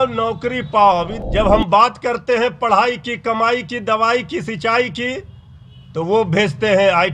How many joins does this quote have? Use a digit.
1